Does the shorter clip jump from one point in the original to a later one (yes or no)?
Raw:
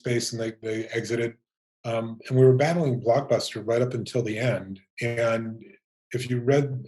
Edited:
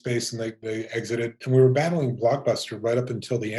yes